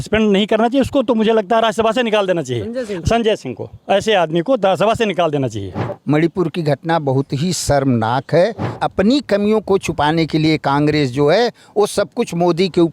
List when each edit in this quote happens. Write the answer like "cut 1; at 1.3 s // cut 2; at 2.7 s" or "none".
cut 1; at 5.9 s // cut 2; at 8.7 s